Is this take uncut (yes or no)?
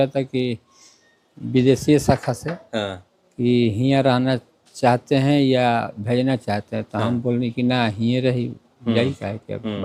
yes